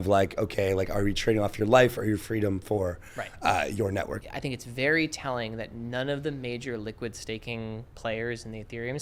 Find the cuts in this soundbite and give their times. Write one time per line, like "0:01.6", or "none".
0:04.2